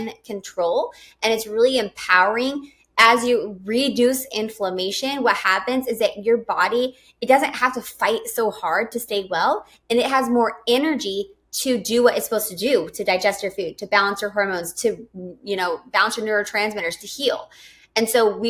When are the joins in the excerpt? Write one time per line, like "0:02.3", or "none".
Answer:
none

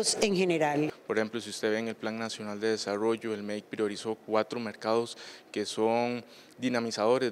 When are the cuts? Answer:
0:01.0

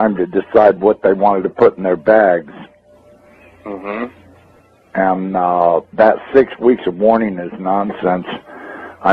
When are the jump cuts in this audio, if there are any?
none

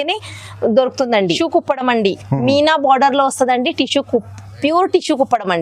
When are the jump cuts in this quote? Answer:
0:01.4

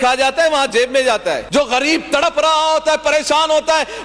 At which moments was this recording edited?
0:01.4

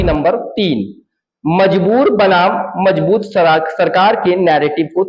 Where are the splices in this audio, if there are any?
none

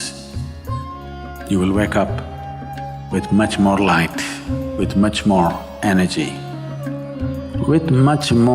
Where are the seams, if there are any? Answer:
0:01.0

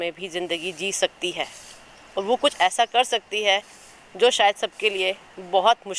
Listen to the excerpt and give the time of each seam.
none

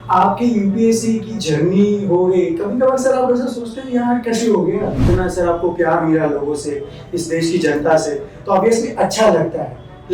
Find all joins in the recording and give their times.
0:05.1

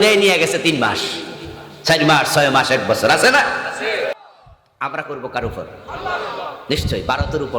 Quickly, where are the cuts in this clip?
0:04.1

